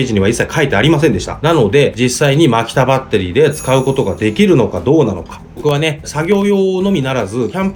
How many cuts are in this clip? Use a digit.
0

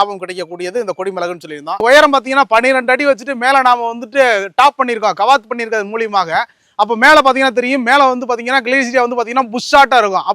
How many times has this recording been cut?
1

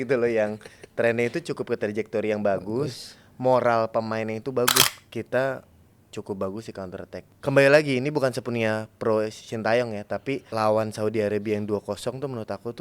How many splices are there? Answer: 3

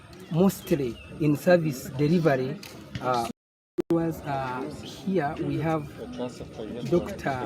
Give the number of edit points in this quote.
1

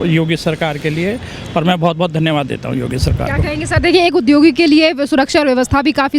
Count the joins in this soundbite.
0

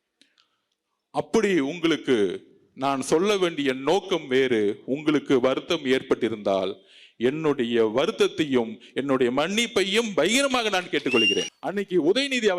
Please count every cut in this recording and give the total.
1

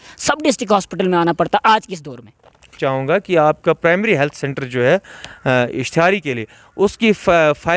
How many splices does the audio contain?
1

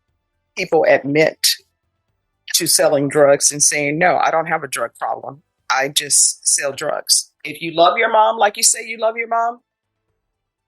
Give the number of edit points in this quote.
1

